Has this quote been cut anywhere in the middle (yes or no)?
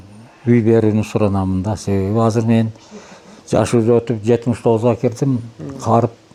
no